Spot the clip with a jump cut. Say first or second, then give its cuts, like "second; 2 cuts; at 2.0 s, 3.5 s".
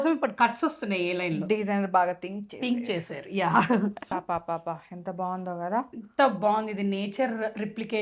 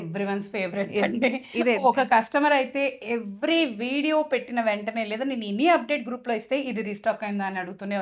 first; 1 cut; at 4.1 s